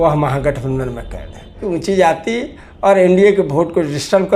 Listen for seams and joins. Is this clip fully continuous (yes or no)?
no